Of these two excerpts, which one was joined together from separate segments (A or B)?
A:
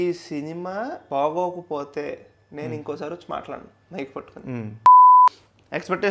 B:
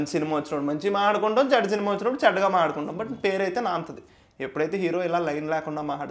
A